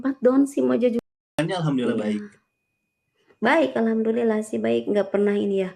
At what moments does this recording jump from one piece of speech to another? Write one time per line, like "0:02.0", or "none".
0:01.0